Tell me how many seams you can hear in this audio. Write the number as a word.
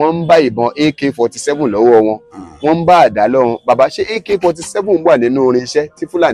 zero